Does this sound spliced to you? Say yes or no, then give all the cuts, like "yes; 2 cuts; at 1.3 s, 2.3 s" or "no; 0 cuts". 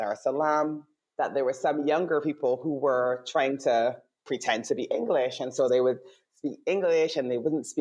no; 0 cuts